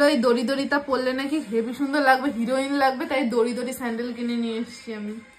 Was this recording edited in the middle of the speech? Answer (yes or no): no